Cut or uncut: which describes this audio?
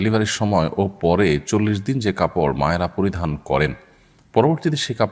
uncut